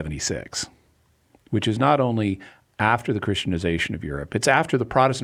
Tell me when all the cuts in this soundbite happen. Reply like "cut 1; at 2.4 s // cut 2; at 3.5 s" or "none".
none